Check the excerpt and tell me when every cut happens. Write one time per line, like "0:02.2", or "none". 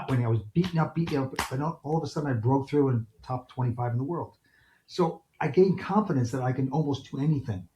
none